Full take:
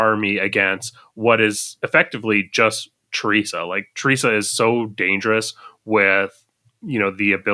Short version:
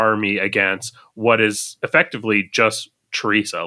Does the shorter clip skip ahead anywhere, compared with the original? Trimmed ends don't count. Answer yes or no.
no